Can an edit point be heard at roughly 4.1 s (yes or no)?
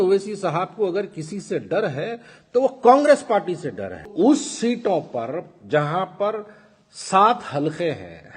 yes